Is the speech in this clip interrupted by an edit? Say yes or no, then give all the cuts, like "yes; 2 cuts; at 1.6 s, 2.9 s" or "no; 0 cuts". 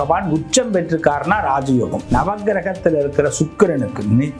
yes; 1 cut; at 2.0 s